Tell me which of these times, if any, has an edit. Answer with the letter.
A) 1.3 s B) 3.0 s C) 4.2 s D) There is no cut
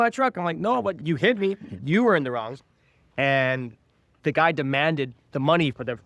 C